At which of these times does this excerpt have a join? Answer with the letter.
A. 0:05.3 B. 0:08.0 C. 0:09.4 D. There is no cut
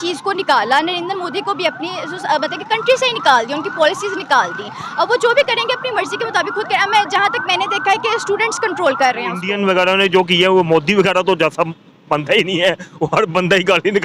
C